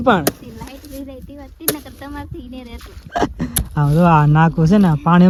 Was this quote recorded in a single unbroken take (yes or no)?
yes